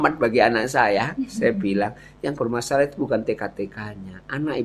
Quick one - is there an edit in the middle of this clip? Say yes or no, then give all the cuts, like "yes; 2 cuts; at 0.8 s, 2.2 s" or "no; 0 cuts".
no; 0 cuts